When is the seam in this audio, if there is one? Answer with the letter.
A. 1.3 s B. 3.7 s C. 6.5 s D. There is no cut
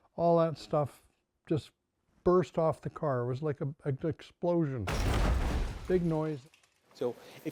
C